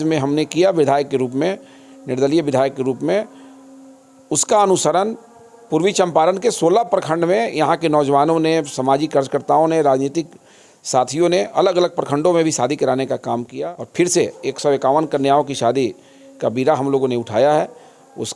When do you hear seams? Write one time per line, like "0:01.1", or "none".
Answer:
0:13.5